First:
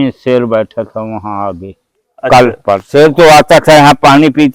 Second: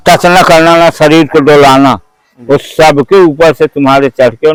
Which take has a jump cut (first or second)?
first